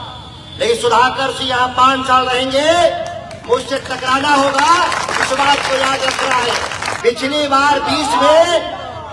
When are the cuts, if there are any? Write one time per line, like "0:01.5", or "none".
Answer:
0:06.8